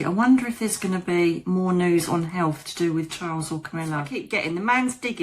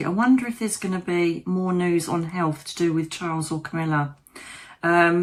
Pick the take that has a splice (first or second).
first